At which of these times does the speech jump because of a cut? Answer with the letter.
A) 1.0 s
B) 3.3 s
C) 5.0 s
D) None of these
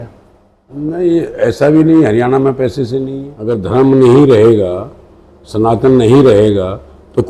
B